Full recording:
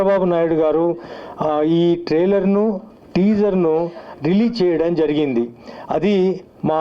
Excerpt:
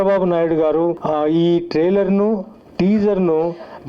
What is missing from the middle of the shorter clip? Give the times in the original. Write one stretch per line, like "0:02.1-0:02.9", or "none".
0:01.0-0:01.4